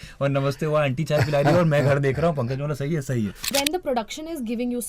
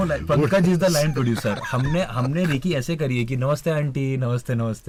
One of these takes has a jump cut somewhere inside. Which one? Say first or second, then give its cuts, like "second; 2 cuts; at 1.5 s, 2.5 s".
first; 1 cut; at 3.4 s